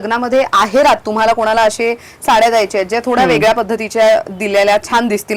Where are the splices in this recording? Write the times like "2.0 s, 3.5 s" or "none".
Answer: none